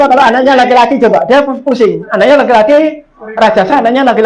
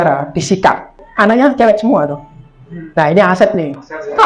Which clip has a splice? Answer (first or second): second